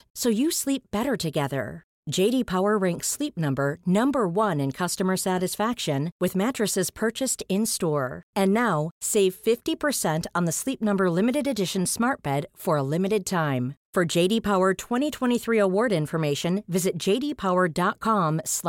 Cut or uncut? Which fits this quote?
uncut